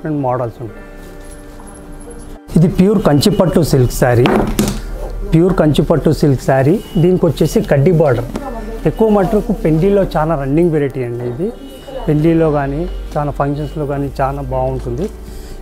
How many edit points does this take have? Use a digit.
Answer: 1